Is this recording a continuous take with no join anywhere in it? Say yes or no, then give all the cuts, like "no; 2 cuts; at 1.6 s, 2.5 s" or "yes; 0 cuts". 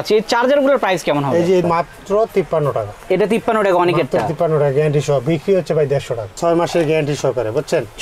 no; 2 cuts; at 1.6 s, 6.4 s